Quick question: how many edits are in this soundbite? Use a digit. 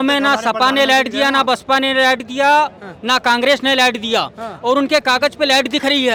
0